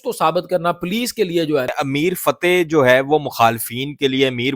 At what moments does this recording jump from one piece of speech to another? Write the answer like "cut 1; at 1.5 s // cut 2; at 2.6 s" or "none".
cut 1; at 1.7 s